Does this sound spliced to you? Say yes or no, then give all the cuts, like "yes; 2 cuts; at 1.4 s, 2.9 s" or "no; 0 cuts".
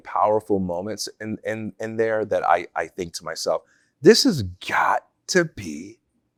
no; 0 cuts